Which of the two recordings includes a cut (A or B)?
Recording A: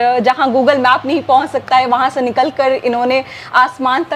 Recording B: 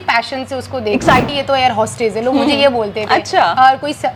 B